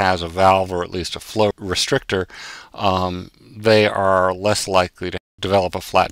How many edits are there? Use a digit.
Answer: 2